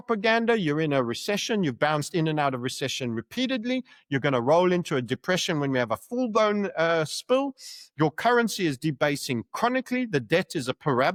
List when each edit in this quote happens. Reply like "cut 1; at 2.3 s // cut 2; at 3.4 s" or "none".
none